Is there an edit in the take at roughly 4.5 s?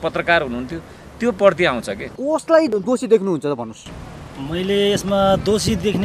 no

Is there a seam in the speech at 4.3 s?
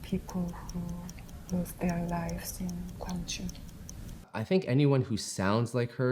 yes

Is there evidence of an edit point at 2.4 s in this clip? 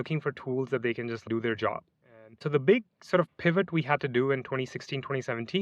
yes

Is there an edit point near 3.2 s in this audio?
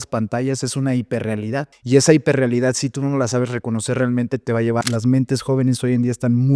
no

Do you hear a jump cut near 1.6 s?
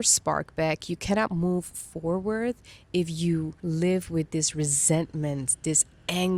no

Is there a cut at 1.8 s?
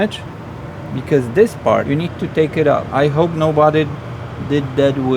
yes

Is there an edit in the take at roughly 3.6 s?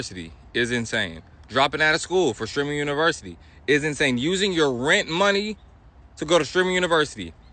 no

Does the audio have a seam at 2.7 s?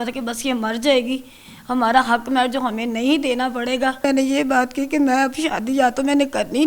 no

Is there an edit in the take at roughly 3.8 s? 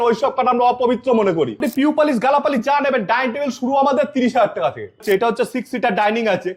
no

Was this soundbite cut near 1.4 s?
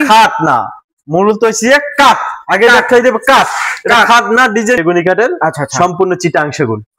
no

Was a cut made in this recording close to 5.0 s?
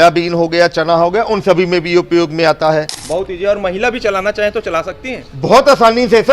no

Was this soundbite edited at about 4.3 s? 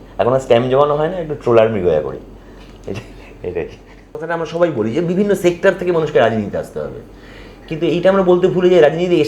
yes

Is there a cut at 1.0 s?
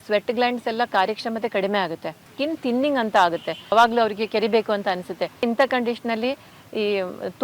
no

